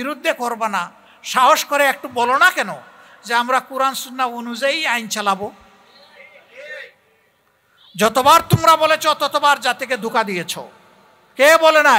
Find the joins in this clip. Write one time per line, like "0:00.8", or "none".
none